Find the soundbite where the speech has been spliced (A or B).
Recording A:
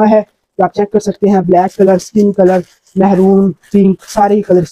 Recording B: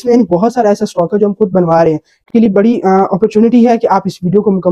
B